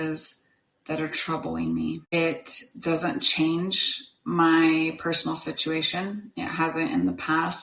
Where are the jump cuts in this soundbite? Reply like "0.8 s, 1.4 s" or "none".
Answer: 2.1 s